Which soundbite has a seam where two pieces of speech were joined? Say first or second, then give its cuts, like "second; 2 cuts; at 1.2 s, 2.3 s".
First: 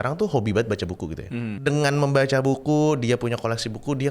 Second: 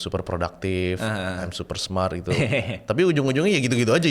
first; 1 cut; at 1.4 s